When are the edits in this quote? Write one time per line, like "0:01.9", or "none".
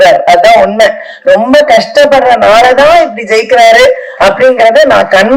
none